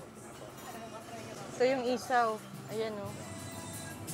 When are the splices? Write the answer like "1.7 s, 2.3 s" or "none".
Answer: none